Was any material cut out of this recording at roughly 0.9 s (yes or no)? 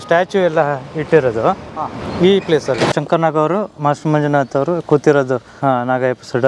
no